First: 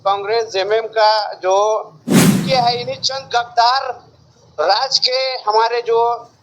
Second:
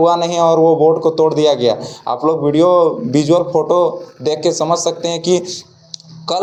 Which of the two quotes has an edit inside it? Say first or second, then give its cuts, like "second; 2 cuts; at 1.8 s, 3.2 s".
first; 1 cut; at 2.4 s